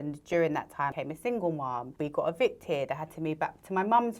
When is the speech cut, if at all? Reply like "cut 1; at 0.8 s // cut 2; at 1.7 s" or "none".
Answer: cut 1; at 0.9 s // cut 2; at 1.9 s